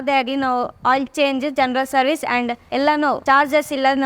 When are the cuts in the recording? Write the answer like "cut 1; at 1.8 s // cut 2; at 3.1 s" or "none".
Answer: cut 1; at 2.8 s